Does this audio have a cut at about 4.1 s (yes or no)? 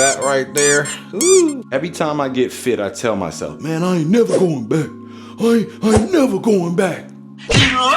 no